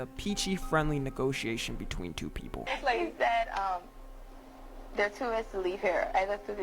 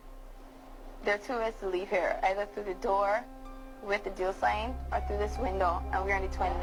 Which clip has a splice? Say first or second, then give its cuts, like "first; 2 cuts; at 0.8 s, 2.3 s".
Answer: first; 1 cut; at 2.6 s